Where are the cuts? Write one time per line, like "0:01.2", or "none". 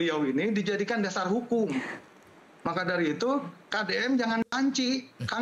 none